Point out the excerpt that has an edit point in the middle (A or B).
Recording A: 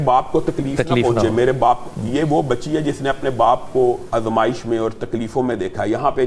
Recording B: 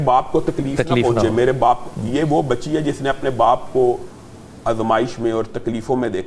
A